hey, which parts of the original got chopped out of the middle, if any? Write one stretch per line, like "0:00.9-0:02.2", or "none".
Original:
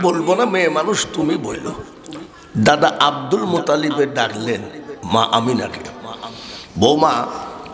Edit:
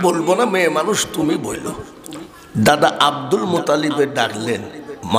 none